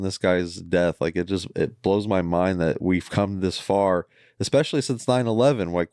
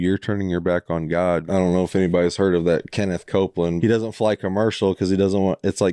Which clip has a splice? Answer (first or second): second